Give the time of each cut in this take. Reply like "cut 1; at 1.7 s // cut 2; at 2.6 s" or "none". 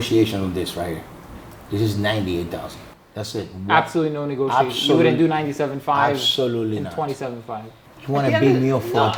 none